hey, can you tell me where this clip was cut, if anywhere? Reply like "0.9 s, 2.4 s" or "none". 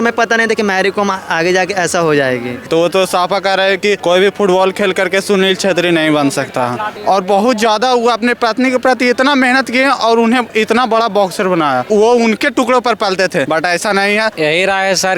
2.7 s, 4.0 s, 7.0 s, 11.9 s, 13.5 s, 14.3 s